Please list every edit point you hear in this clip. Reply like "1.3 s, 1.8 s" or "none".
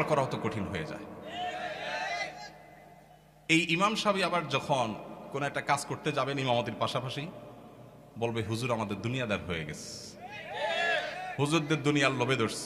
none